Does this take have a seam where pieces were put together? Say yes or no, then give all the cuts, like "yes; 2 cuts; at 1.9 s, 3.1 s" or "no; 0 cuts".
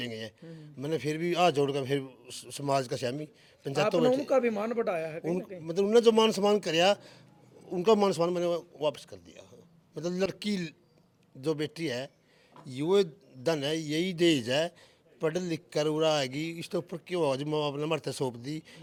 no; 0 cuts